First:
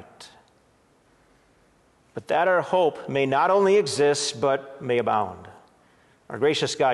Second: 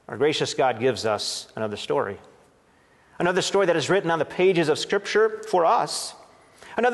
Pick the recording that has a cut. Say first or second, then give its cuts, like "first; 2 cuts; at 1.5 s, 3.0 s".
first; 1 cut; at 1.1 s